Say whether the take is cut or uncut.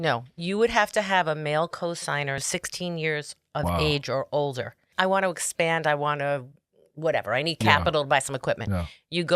cut